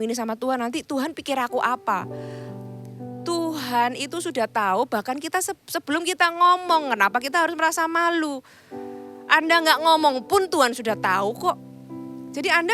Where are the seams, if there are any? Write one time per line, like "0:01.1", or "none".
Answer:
none